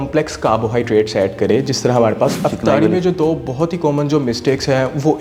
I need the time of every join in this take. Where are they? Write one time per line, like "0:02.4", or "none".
0:02.4